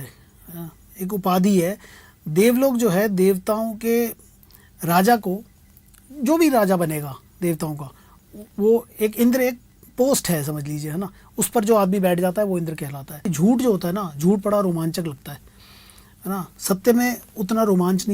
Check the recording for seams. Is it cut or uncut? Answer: cut